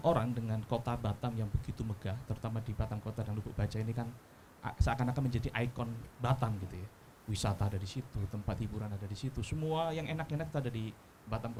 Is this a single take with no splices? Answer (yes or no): yes